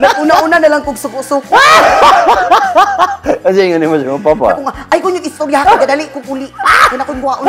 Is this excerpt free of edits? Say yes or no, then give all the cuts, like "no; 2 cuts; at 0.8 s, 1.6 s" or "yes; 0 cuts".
yes; 0 cuts